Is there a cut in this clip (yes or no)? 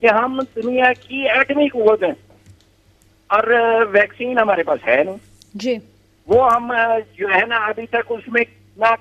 no